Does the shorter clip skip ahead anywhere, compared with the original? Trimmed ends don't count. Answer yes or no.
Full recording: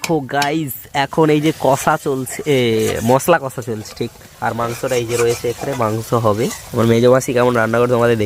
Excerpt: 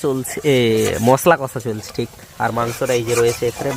no